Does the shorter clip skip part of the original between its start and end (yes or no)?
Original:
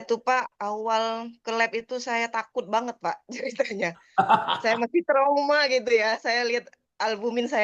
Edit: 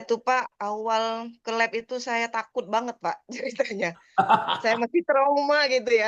no